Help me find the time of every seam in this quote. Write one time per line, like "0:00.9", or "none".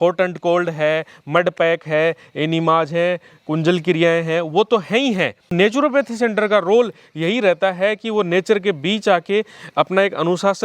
0:05.5